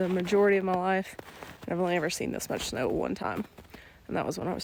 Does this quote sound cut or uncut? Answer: uncut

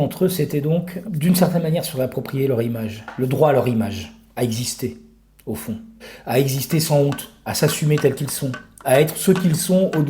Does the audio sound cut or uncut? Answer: cut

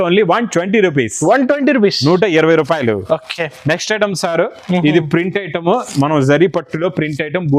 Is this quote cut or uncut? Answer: uncut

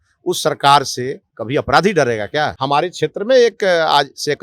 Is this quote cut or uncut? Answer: cut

